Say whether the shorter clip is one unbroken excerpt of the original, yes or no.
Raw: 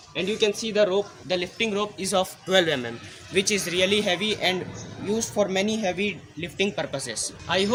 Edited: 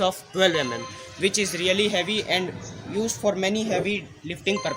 yes